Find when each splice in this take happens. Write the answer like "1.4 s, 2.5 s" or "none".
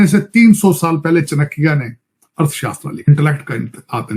3.1 s